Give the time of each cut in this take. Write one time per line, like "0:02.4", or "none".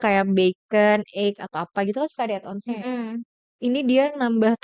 0:03.4